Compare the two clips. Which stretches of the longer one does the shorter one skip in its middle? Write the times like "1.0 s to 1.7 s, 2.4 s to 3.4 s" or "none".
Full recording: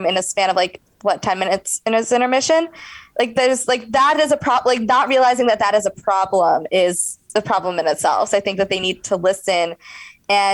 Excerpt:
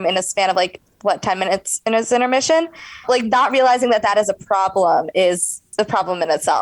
3.0 s to 4.6 s